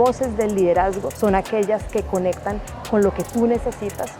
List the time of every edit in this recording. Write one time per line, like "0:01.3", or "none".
0:01.1